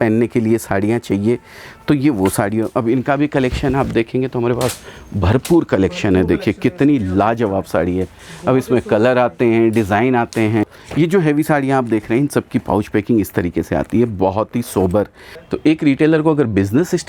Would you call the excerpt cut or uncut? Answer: cut